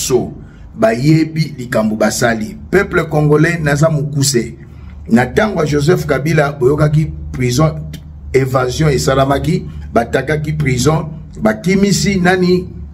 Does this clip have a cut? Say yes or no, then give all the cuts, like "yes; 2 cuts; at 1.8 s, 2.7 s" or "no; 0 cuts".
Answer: no; 0 cuts